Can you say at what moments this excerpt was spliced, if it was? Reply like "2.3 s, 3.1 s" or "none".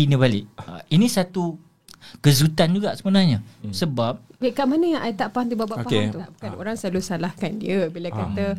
6.5 s